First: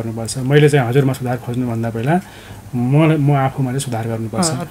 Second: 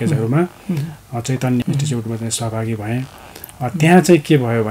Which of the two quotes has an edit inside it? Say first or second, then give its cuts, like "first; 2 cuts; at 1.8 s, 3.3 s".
second; 1 cut; at 1.6 s